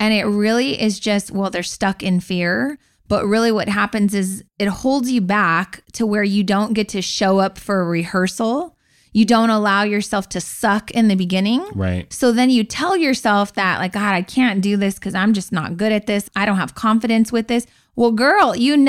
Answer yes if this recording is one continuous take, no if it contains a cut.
yes